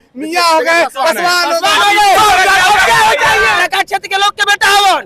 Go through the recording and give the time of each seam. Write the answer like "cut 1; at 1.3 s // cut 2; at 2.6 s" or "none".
cut 1; at 3.6 s